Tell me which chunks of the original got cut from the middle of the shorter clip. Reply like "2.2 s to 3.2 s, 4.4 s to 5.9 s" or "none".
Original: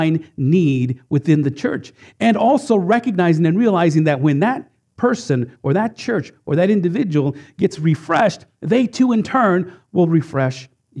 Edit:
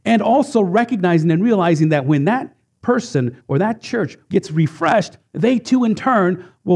6.3 s to 7.5 s